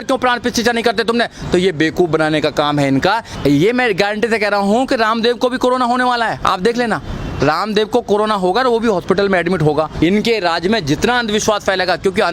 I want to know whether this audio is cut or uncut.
cut